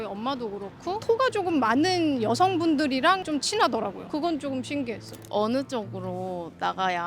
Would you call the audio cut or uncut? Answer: cut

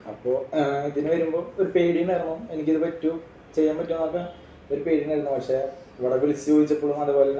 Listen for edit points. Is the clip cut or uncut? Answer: uncut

